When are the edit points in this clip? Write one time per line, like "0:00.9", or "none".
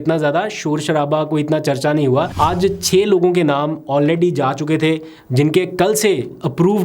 0:02.3